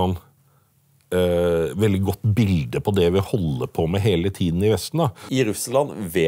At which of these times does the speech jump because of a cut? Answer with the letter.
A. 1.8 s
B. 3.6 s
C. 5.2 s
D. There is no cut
C